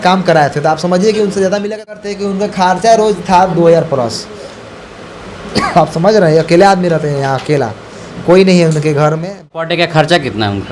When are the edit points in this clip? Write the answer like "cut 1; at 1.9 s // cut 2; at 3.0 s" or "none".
cut 1; at 2.0 s // cut 2; at 9.5 s